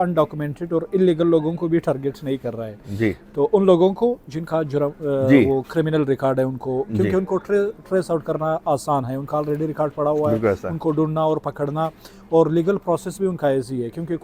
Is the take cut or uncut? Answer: uncut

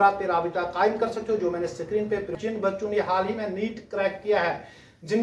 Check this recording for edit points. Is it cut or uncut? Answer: cut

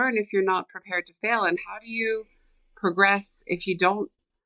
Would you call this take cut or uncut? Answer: uncut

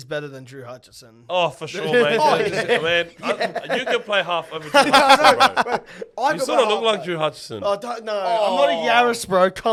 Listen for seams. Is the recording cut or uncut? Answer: uncut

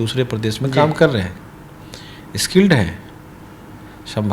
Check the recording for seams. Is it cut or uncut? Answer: uncut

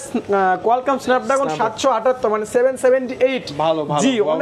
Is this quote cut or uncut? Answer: uncut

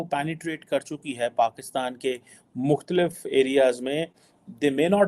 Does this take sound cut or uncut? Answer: uncut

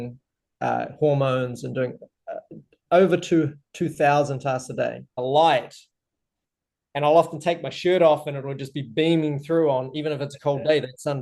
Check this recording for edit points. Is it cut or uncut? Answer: cut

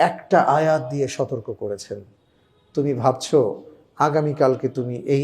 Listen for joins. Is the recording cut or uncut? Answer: uncut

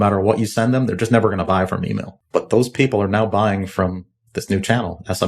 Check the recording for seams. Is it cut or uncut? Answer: cut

